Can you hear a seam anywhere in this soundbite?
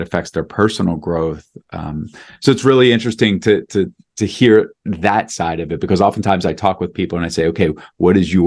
no; 0 cuts

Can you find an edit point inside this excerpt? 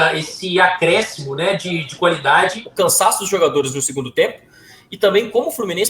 yes; 1 cut; at 2.6 s

